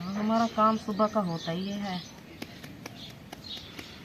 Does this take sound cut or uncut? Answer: uncut